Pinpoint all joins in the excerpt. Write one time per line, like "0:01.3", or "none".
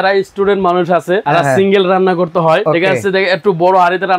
0:01.2
0:02.6